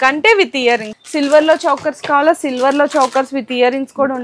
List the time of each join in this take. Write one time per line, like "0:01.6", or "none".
0:00.9